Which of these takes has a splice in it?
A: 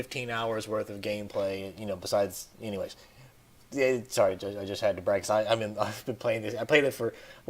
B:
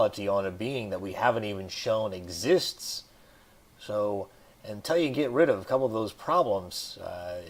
A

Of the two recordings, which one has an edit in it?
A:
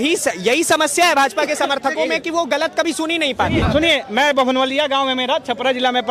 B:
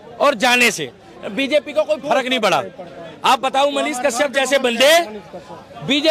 A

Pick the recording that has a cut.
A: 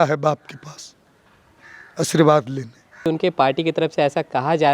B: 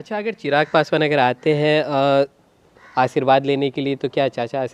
A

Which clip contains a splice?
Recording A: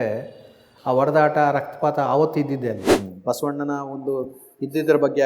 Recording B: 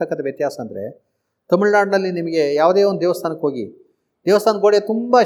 A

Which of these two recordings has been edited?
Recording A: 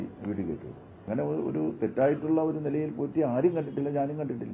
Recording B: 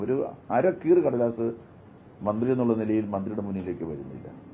A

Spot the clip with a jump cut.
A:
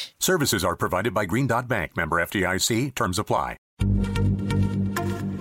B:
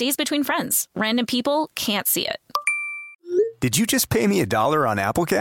A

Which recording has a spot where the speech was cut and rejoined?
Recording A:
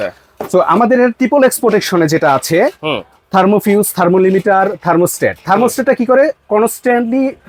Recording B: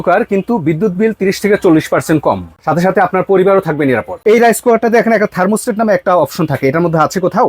B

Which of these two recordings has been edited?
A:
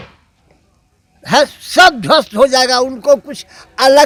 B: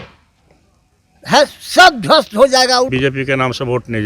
B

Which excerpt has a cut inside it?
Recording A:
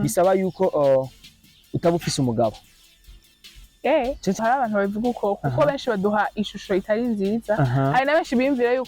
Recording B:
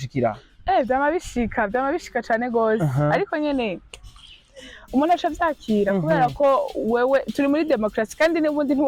A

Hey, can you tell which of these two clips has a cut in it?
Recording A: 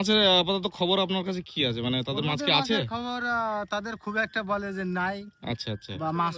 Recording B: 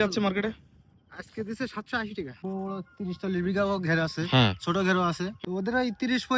B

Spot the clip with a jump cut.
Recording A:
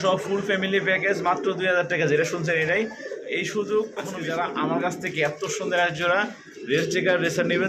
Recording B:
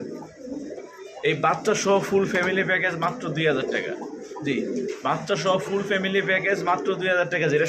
A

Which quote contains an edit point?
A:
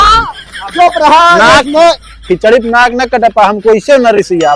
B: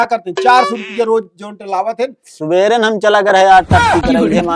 B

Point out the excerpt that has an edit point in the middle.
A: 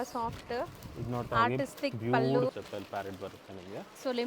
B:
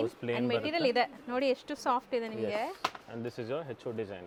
A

